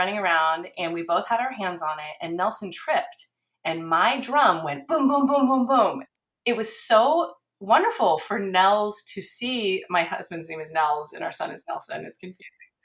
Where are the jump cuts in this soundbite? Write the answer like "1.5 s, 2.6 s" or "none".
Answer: 6.1 s